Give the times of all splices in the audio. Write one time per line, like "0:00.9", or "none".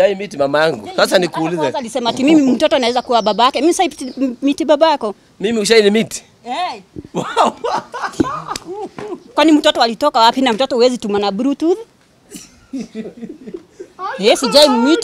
none